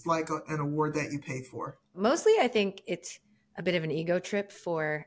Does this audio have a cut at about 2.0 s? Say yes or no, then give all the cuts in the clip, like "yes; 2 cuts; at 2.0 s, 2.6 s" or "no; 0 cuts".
yes; 1 cut; at 2.0 s